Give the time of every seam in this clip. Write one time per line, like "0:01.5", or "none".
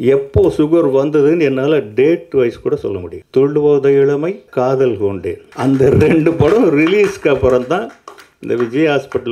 0:03.1
0:04.4
0:05.5